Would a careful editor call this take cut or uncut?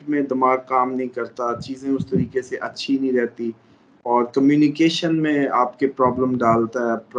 uncut